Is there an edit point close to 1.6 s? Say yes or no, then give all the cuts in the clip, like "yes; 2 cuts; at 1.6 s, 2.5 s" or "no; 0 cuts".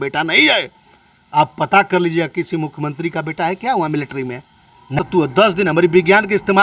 no; 1 cut; at 5.0 s